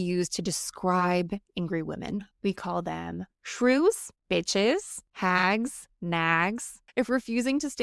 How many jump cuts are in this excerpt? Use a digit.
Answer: 5